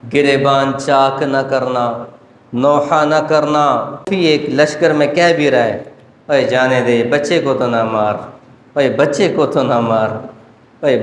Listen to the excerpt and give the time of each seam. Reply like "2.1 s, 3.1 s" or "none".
4.1 s